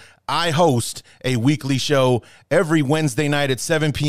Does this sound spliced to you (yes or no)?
no